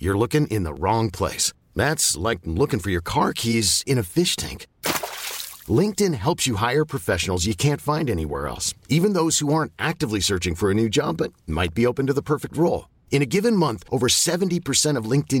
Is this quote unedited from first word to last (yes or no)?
yes